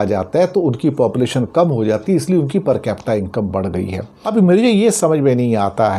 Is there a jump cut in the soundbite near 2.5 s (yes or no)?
no